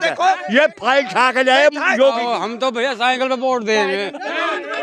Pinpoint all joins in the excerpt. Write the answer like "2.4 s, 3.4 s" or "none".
2.3 s